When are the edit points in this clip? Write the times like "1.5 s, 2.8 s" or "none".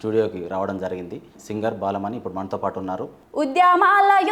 1.4 s, 3.2 s

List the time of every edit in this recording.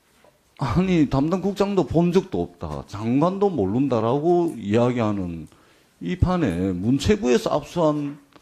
3.8 s

